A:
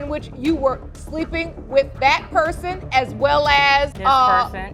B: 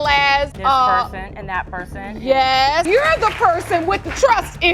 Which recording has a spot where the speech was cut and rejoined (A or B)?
B